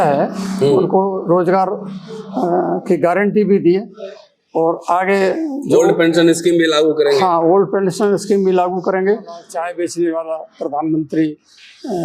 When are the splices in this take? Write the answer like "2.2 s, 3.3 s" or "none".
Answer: 9.5 s